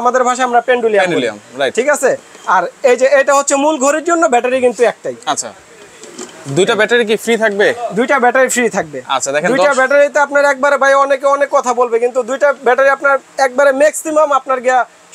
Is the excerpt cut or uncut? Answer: uncut